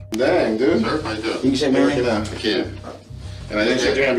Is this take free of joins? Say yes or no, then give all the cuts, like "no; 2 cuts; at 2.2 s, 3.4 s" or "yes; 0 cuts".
yes; 0 cuts